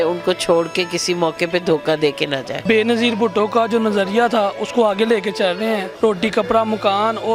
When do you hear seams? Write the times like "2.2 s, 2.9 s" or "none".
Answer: 2.6 s, 5.9 s